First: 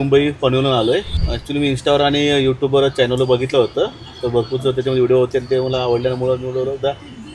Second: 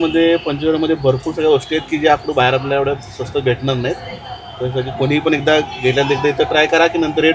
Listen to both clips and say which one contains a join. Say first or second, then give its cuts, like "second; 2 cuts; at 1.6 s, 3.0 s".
first; 1 cut; at 1.2 s